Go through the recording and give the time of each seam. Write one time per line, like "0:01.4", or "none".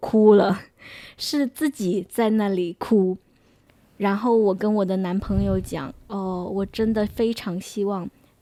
none